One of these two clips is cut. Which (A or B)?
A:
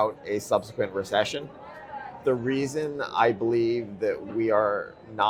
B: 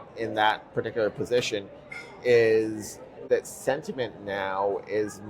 B